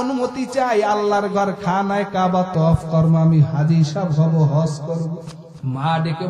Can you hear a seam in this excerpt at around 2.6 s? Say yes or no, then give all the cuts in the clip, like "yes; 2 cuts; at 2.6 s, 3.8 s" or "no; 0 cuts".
no; 1 cut; at 5.3 s